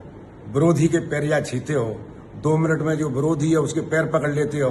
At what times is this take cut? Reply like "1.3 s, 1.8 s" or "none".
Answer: none